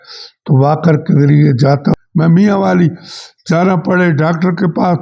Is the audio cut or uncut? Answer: cut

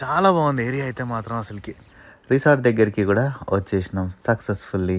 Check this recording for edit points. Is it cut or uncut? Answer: cut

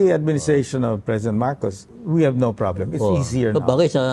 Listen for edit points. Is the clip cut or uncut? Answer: cut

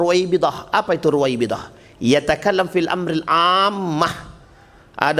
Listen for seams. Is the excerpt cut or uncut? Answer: uncut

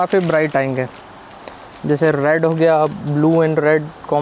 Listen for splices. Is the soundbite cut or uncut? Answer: uncut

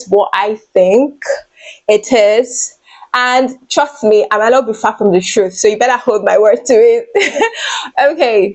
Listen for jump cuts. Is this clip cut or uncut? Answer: uncut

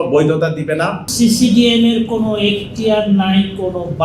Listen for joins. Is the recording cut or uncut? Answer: cut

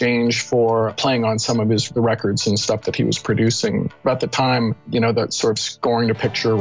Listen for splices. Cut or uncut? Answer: cut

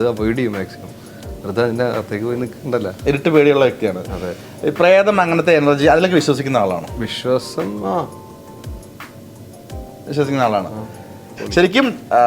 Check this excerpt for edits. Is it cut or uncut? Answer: cut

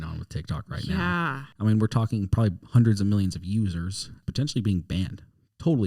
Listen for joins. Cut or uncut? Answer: cut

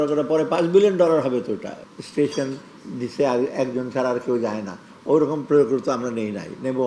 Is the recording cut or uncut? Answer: cut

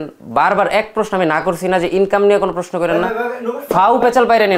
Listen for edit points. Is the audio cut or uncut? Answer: uncut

